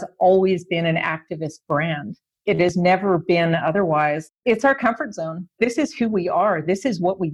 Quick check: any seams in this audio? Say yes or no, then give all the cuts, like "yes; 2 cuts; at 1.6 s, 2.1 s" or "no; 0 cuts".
yes; 1 cut; at 4.2 s